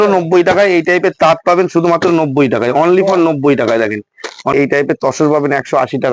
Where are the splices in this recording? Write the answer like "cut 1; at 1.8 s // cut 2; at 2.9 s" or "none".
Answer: cut 1; at 4.5 s